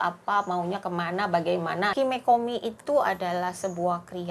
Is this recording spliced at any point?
yes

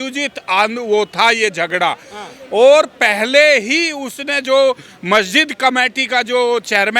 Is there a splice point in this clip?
no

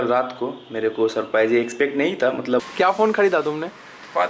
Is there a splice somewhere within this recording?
yes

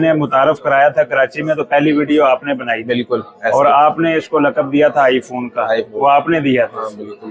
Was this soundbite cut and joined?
no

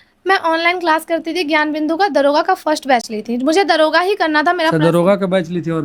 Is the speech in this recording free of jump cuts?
yes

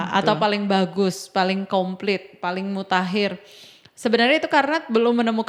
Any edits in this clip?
no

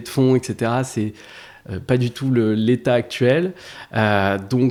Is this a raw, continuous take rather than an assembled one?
yes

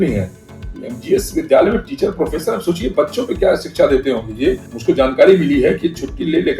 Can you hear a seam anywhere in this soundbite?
yes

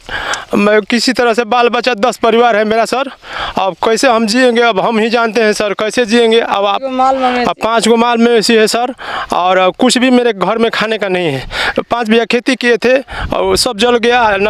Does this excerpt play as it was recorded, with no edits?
yes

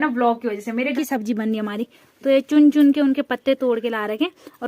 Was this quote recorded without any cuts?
no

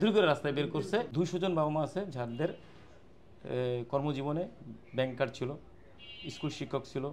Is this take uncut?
no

